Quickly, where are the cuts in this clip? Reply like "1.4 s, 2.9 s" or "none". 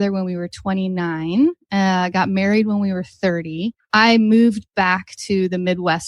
3.8 s